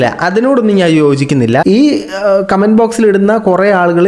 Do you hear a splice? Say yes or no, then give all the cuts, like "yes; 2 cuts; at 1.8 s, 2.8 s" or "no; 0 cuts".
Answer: yes; 1 cut; at 1.6 s